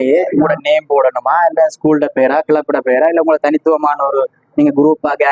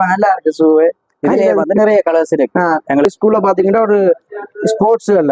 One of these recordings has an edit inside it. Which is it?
second; 1 cut; at 3.1 s

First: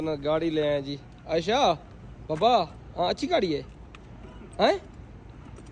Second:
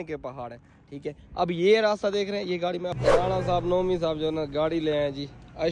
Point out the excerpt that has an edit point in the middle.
second; 1 cut; at 3.0 s

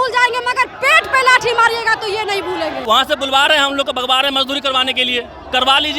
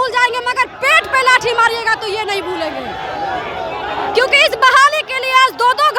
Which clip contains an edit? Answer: first; 1 cut; at 2.8 s

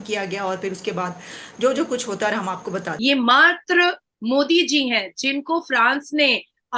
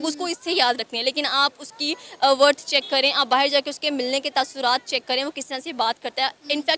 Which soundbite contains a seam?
first; 1 cut; at 2.9 s

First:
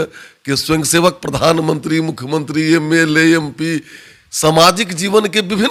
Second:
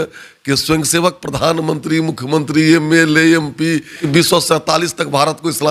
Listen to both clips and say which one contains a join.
second; 1 cut; at 4.0 s

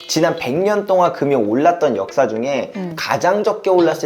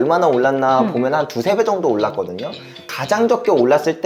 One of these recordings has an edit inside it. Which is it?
second; 1 cut; at 2.9 s

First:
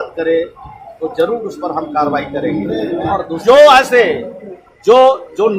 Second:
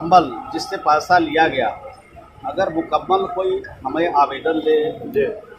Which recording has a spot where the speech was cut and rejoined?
first; 1 cut; at 3.3 s

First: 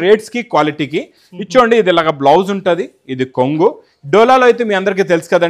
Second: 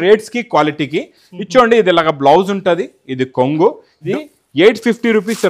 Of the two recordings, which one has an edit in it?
second; 1 cut; at 3.9 s

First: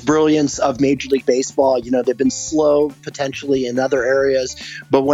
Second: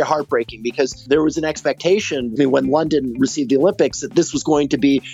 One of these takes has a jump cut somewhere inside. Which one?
second; 2 cuts; at 1.0 s, 2.3 s

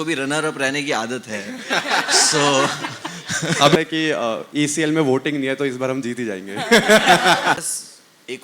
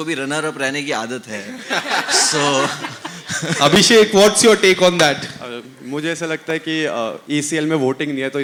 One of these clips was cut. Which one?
first; 2 cuts; at 3.8 s, 7.6 s

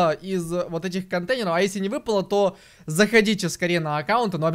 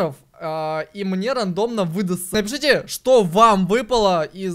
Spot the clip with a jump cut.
second; 1 cut; at 2.3 s

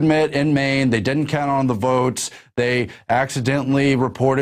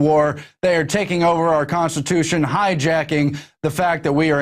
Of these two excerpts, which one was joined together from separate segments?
second; 1 cut; at 2.2 s

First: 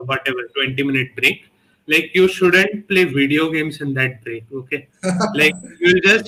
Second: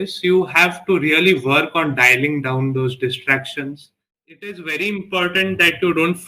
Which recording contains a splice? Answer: second; 1 cut; at 4.5 s

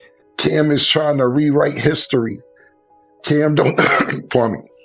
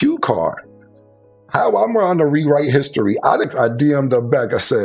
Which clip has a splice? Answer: second; 1 cut; at 3.4 s

